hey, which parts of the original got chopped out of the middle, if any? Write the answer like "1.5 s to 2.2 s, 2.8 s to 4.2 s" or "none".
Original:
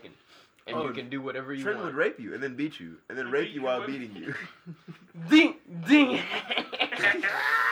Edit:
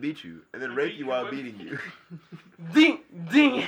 none